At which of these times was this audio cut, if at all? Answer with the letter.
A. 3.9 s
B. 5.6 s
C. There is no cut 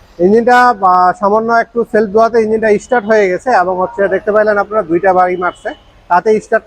C